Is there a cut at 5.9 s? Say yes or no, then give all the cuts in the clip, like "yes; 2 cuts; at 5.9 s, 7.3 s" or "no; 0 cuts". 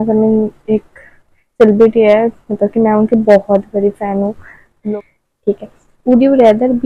no; 1 cut; at 4.7 s